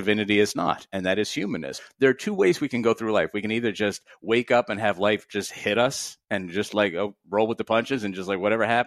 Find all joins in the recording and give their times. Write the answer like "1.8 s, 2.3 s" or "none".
1.8 s